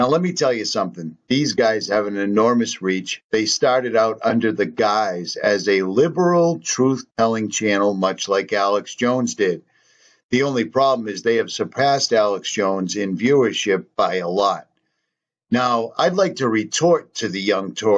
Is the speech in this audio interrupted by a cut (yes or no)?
no